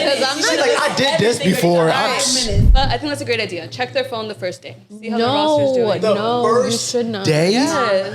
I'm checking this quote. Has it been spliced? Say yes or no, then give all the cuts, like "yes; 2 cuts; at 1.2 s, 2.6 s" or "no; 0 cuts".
yes; 1 cut; at 2.6 s